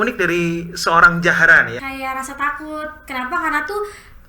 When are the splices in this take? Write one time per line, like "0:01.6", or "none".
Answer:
0:01.8